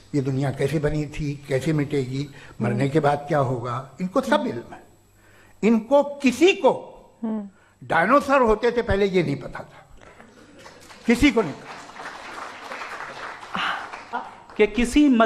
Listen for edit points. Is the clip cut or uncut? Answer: cut